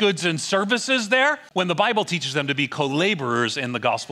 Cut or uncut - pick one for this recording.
cut